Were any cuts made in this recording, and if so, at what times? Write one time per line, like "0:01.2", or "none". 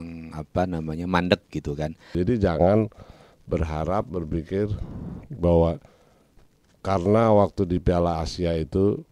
0:02.1